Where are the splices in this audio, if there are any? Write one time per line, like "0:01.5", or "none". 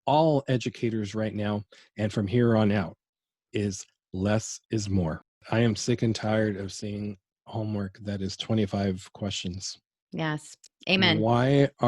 0:05.4